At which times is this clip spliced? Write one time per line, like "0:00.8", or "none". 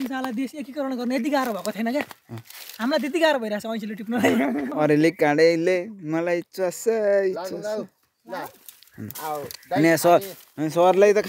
none